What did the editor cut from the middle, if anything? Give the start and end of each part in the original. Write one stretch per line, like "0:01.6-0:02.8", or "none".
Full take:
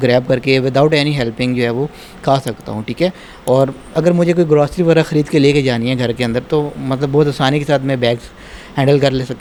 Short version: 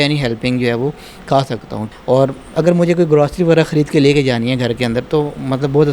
0:02.8-0:03.3